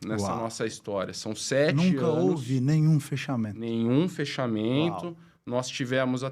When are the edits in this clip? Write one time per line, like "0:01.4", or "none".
none

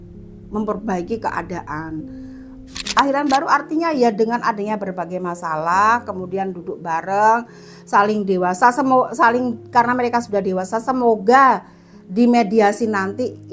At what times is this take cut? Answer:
0:03.0

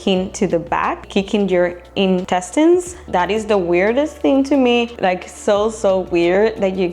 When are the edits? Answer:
0:01.0
0:02.2
0:03.0
0:04.9

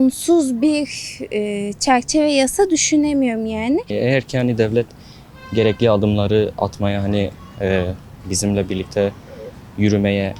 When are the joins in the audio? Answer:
0:03.9

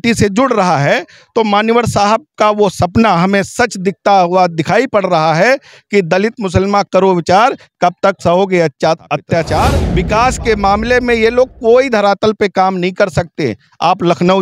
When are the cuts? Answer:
0:09.8

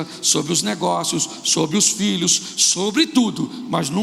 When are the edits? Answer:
none

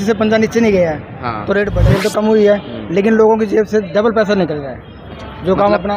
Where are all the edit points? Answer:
0:01.9

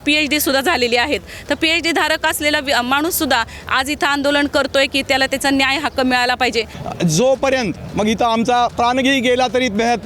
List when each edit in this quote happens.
0:06.8

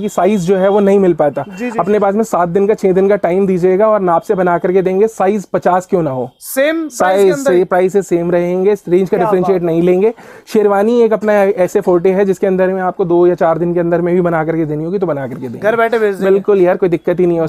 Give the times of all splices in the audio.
none

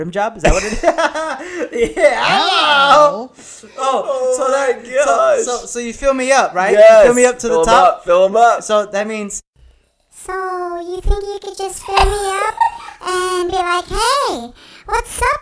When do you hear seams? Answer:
none

